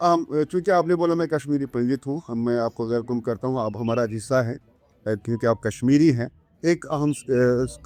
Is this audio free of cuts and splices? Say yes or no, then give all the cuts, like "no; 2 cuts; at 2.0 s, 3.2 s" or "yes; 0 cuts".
yes; 0 cuts